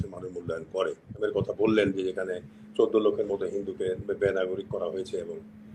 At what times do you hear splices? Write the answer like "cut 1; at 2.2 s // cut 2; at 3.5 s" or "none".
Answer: cut 1; at 1.2 s